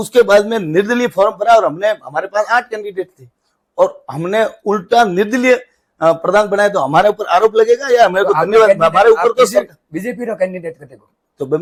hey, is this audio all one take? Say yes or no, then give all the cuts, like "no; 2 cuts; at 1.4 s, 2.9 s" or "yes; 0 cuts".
yes; 0 cuts